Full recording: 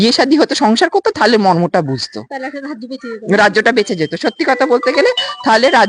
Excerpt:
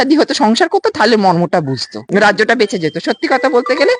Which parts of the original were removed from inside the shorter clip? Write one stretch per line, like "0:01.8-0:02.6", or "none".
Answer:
0:02.1-0:03.1

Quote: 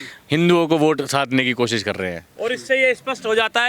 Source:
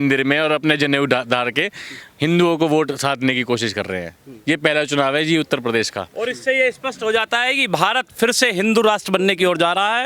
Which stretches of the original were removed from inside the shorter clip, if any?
0:04.2-0:06.0

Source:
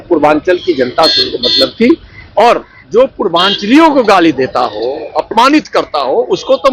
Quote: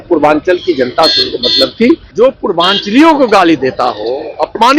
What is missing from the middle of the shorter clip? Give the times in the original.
0:02.1-0:02.8

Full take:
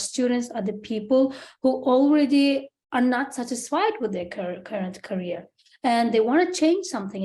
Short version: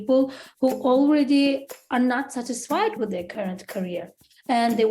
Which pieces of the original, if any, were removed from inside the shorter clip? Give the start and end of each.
0:04.3-0:04.6

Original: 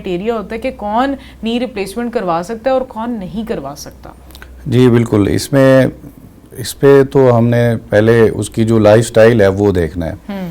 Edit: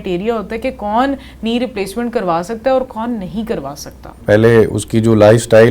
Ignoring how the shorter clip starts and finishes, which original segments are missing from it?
0:04.2-0:07.8

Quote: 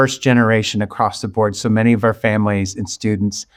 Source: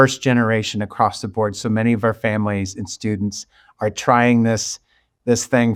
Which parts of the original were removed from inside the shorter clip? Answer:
none

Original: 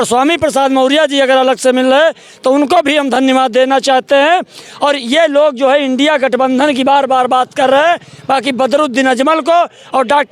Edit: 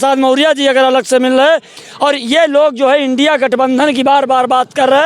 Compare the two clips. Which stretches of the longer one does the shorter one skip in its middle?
0:02.3-0:04.6

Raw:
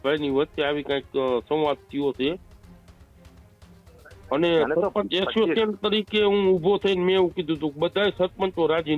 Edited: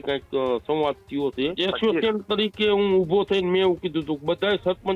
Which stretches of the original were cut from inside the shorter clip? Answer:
0:02.4-0:05.1

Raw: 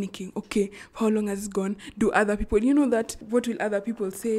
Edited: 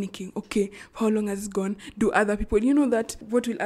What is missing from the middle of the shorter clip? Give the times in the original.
none

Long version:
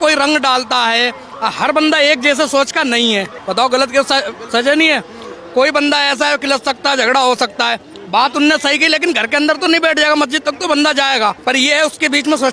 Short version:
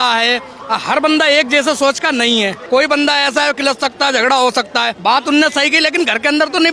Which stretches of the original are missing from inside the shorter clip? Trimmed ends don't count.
0:03.3-0:05.4
0:07.8-0:08.0

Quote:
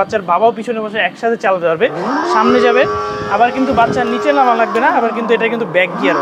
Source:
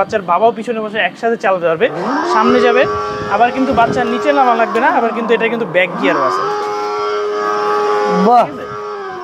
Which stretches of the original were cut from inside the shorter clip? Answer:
none

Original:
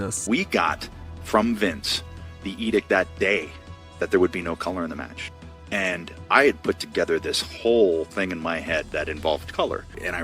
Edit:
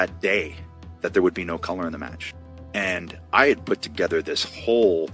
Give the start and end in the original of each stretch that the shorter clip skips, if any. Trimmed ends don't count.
none

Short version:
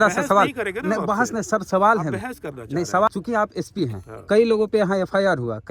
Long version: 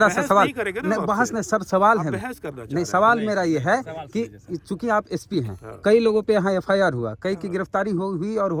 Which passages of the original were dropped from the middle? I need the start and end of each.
0:03.1-0:04.6

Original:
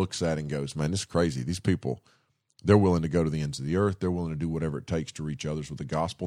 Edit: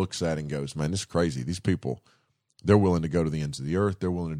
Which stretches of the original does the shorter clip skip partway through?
none

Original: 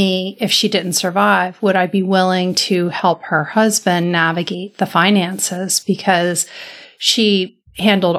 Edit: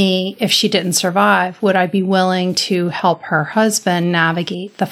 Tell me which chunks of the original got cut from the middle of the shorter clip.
none

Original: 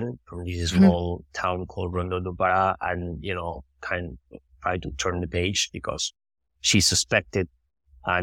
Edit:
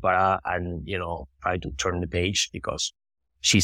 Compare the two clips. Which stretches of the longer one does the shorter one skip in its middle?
0:03.7-0:04.5

